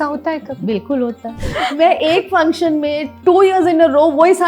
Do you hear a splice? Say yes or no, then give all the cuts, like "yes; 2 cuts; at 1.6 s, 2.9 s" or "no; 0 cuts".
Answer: yes; 1 cut; at 1.4 s